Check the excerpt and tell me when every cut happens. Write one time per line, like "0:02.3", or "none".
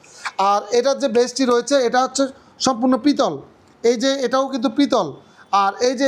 none